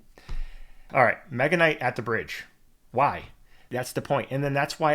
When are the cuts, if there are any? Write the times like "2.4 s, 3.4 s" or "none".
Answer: 0.8 s, 3.7 s